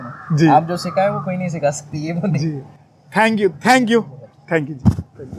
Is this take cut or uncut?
uncut